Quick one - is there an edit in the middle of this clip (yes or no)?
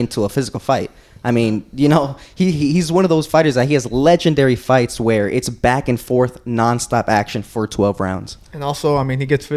no